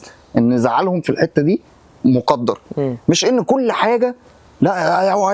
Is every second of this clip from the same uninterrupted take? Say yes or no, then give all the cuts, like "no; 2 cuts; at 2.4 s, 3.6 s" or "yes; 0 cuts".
yes; 0 cuts